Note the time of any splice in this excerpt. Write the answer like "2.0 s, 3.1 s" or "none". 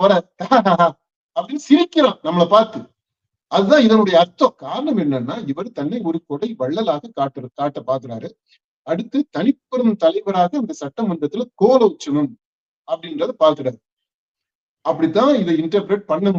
4.7 s